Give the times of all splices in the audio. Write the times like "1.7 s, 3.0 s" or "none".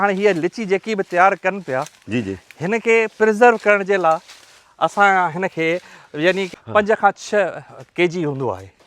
6.5 s